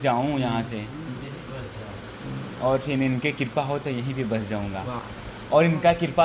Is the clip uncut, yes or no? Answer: yes